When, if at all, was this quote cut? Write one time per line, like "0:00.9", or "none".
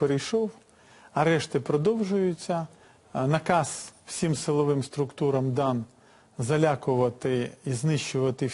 0:03.3